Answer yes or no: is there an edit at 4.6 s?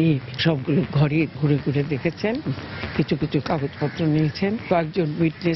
yes